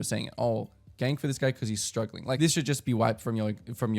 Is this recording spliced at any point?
yes; 1 cut; at 2.4 s

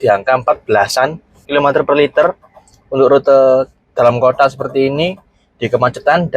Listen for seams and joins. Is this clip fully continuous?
no; 1 cut; at 1.4 s

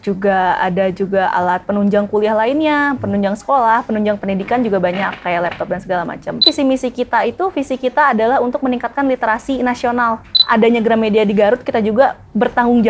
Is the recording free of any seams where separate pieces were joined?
no; 2 cuts; at 6.4 s, 10.4 s

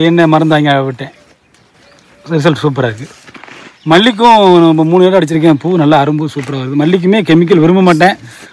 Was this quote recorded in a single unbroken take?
yes; 0 cuts

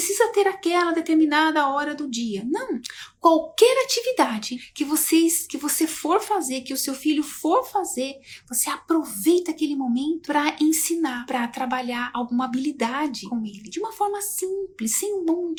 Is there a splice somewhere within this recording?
no; 0 cuts

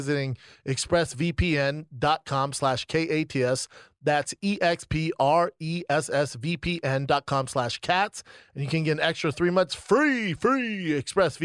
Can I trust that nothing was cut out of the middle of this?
yes; 0 cuts

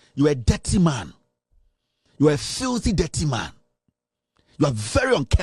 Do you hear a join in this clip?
no; 0 cuts

